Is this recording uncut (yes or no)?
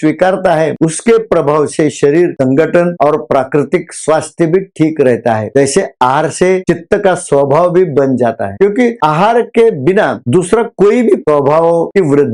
yes